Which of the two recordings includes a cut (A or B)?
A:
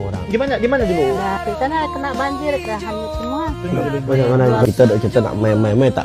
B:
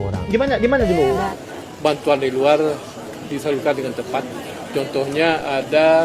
B